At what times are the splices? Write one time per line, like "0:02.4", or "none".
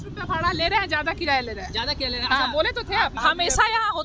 0:03.2